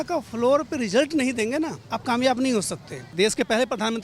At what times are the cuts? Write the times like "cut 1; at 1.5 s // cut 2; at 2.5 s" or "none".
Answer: cut 1; at 1.9 s // cut 2; at 3.0 s